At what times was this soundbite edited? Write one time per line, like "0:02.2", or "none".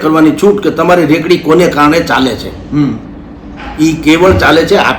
none